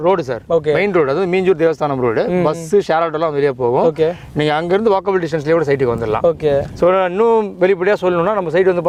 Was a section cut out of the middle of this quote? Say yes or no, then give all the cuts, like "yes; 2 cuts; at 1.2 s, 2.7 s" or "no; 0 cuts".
no; 0 cuts